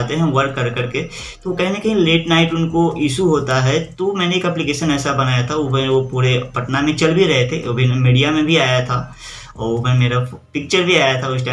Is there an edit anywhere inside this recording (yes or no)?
no